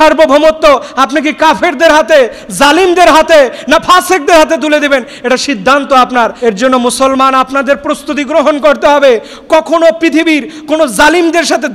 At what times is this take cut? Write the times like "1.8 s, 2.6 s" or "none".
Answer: 6.3 s